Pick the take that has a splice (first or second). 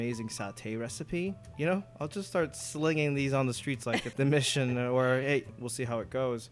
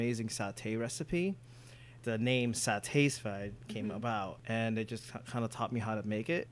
first